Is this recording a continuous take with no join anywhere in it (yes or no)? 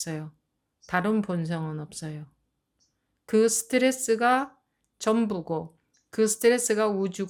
yes